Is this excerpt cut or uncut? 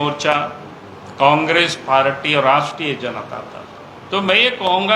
cut